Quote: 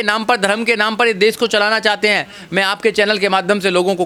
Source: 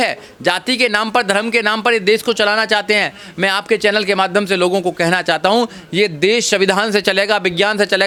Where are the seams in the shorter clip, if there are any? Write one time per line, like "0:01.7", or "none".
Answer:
none